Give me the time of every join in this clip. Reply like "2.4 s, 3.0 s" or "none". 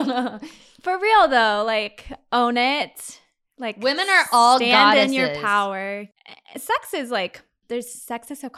6.1 s, 7.5 s